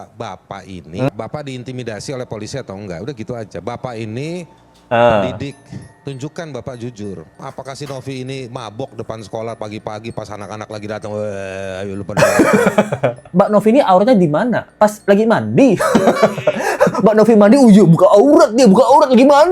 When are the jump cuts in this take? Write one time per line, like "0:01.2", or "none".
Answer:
0:01.1
0:07.4
0:13.2